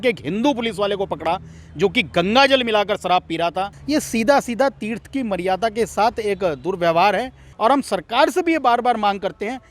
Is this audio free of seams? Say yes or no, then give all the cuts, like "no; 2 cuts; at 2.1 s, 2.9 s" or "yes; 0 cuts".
no; 2 cuts; at 3.8 s, 7.4 s